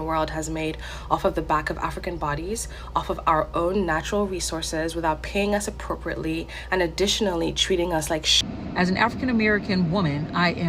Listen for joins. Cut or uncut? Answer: cut